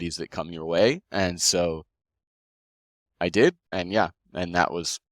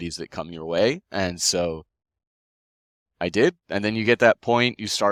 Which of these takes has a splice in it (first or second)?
first